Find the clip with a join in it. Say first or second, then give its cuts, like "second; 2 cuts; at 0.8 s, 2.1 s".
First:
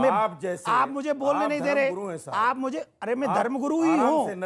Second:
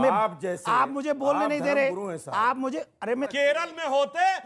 second; 1 cut; at 3.3 s